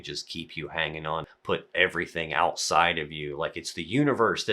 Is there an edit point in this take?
yes; 1 cut; at 1.3 s

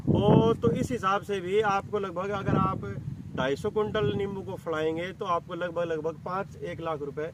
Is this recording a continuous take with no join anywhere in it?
yes; 0 cuts

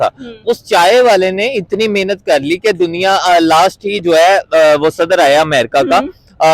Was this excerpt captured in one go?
yes; 0 cuts

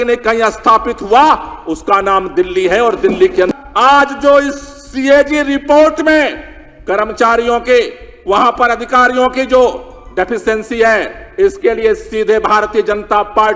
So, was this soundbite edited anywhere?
yes; 1 cut; at 3.5 s

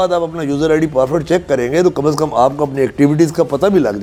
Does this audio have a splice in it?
no; 0 cuts

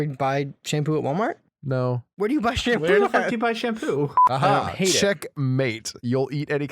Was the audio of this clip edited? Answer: yes; 1 cut; at 4.2 s

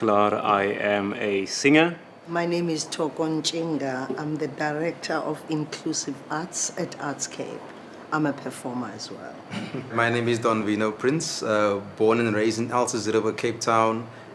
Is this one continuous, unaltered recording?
yes; 0 cuts

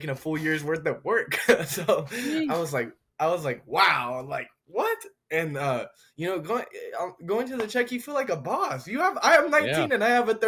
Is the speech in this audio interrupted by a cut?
no; 0 cuts

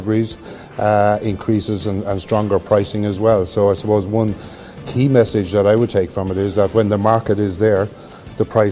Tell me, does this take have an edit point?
no; 0 cuts

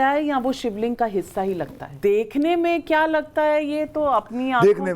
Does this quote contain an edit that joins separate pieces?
yes; 1 cut; at 1.8 s

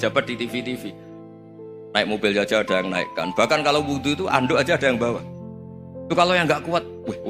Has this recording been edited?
no; 0 cuts

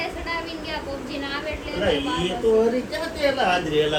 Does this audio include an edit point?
no; 0 cuts

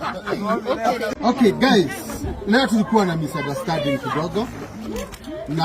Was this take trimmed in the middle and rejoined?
yes; 1 cut; at 1.1 s

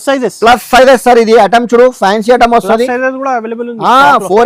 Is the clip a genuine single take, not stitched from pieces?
yes; 0 cuts

